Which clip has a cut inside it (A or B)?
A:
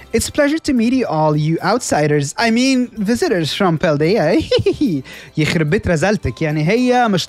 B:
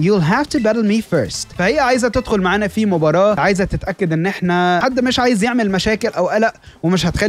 B